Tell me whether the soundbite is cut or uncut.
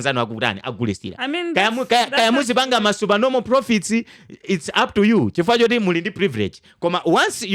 uncut